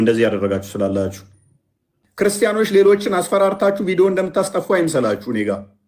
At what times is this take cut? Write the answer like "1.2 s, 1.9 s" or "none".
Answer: 2.1 s